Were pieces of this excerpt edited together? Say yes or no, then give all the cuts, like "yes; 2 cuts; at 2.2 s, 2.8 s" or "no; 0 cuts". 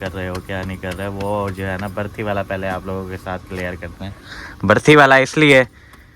no; 0 cuts